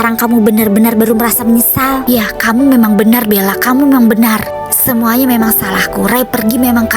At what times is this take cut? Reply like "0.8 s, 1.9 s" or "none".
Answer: 2.0 s

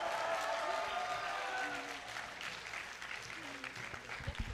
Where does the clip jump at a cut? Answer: none

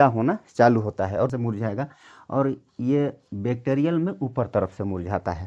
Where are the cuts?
1.3 s

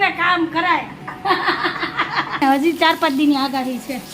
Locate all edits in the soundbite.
2.4 s

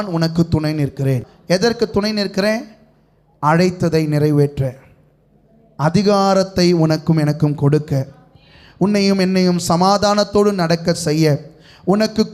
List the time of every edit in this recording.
1.3 s

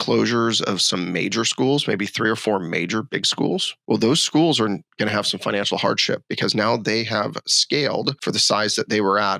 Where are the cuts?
3.7 s

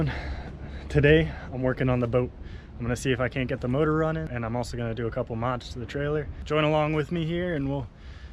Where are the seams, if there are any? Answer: 4.3 s, 6.4 s

